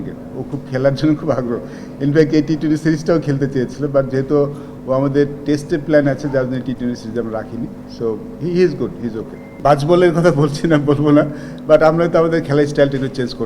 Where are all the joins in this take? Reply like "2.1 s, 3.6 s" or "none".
9.6 s